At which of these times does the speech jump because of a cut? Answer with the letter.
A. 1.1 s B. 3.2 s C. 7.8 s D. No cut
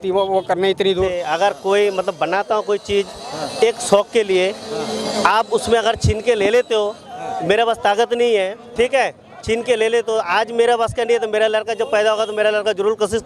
A